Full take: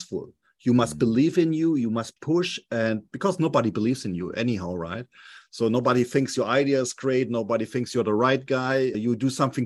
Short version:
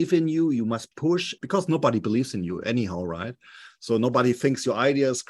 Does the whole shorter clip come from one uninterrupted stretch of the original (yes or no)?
no